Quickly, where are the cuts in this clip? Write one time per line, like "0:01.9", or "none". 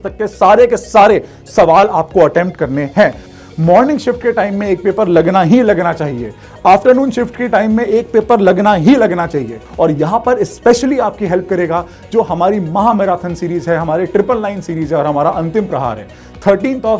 0:03.2
0:09.6